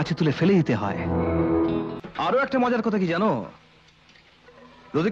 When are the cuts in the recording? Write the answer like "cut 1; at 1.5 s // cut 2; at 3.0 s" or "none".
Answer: cut 1; at 2.0 s